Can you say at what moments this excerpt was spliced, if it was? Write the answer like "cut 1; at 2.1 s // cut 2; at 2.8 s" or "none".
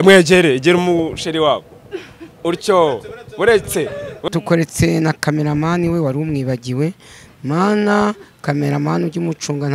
cut 1; at 4.2 s

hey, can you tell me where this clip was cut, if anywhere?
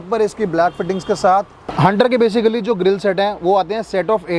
cut 1; at 1.6 s

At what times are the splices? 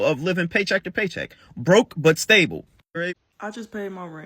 cut 1; at 3.1 s

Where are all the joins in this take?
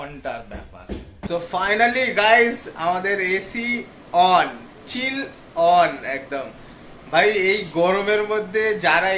cut 1; at 1.3 s

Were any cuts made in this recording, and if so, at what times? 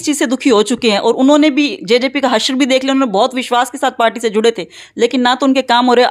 none

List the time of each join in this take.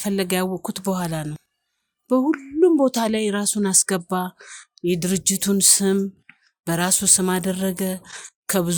none

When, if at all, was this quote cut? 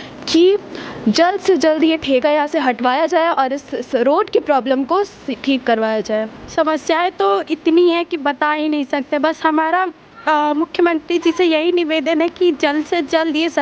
cut 1; at 6.4 s

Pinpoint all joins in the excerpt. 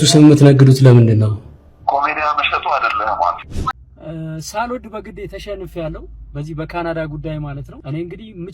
cut 1; at 3.7 s

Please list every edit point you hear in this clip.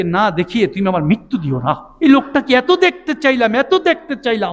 cut 1; at 1.9 s

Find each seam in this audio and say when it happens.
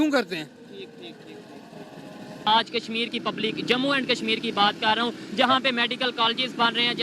cut 1; at 2.4 s

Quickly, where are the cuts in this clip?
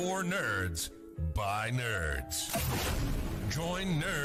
none

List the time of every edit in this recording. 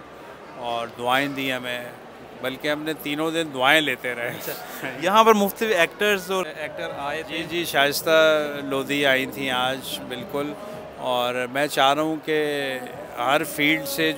none

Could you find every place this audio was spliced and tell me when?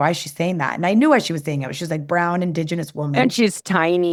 none

